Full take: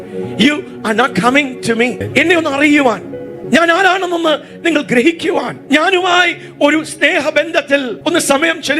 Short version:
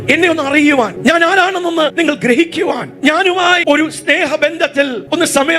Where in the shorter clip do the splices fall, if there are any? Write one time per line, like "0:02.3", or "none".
0:00.9
0:01.9
0:03.6